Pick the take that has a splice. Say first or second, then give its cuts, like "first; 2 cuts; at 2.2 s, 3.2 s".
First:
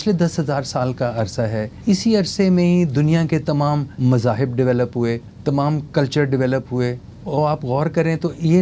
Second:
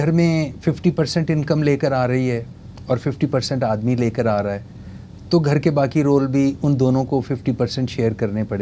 first; 4 cuts; at 1.7 s, 3.9 s, 5.3 s, 7.1 s